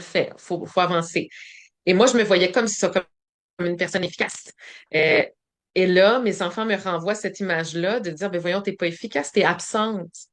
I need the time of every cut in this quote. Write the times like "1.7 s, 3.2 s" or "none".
none